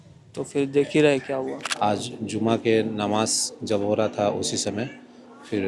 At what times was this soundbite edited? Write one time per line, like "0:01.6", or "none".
0:01.5